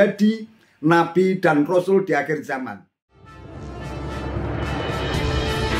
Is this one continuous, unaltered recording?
no; 1 cut; at 2.6 s

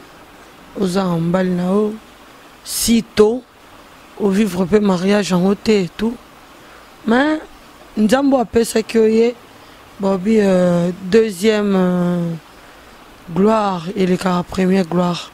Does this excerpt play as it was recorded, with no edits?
yes; 0 cuts

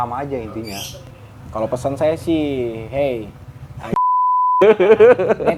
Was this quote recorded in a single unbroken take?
yes; 0 cuts

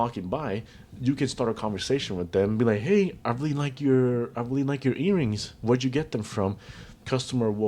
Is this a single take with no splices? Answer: yes; 0 cuts

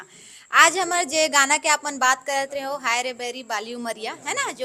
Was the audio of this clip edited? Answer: no; 0 cuts

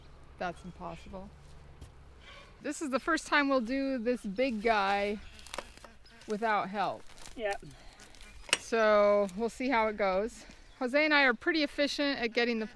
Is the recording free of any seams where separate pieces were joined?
yes; 0 cuts

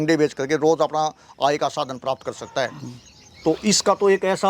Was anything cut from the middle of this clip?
no; 0 cuts

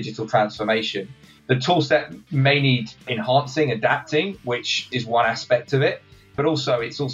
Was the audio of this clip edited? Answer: yes; 4 cuts; at 1.1 s, 3.1 s, 4.8 s, 6.4 s

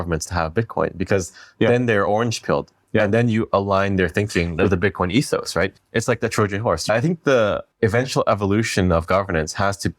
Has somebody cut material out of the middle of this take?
yes; 4 cuts; at 4.6 s, 5.7 s, 6.9 s, 7.7 s

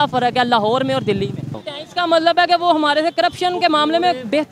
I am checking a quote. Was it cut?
yes; 1 cut; at 1.7 s

